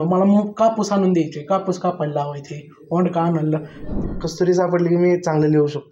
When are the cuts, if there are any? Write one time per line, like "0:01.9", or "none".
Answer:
0:04.0